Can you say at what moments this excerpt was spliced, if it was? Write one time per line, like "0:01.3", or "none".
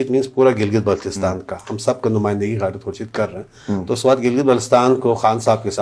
none